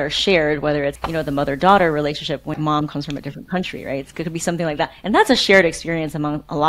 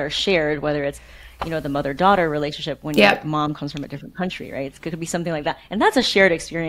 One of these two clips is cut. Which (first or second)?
first